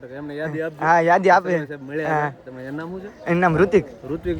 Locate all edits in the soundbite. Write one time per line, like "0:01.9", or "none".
none